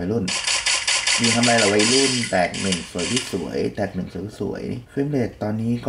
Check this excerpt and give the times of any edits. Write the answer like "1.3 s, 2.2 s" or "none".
4.8 s